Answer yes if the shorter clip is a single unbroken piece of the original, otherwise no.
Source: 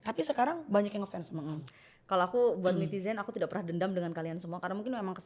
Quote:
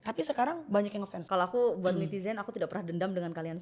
no